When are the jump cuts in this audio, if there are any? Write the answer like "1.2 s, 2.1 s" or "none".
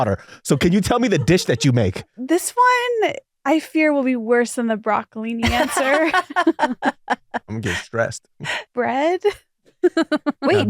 2.2 s, 8.6 s